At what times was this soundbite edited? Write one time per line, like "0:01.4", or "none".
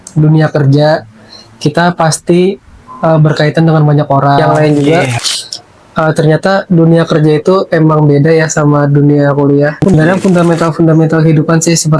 0:04.4
0:09.9